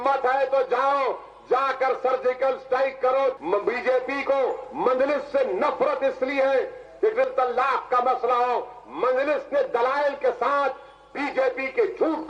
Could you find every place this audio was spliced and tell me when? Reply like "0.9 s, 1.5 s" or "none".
3.4 s